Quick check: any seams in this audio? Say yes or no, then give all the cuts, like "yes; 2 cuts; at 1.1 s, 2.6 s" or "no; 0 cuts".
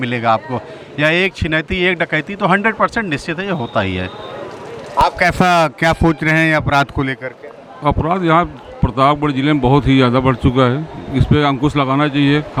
no; 0 cuts